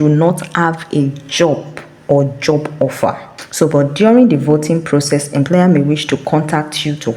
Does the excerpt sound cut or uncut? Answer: uncut